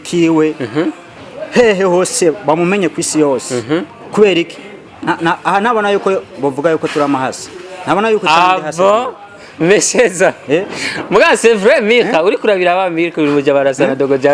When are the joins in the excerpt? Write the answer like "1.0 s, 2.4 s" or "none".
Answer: none

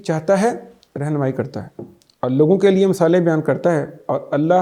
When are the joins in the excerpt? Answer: none

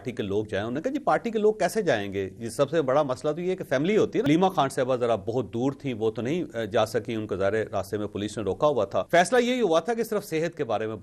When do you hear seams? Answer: 4.3 s, 9.1 s

